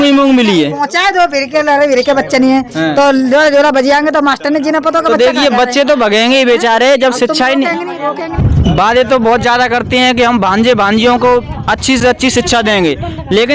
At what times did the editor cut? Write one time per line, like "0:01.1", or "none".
0:08.4